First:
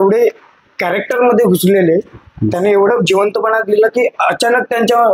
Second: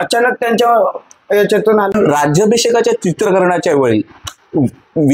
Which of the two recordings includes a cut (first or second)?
second